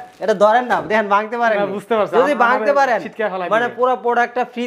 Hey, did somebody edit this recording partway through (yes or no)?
no